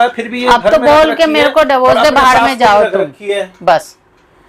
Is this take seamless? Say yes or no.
yes